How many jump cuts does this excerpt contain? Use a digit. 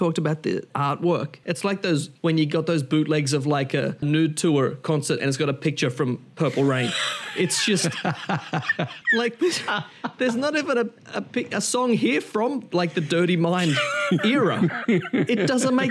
3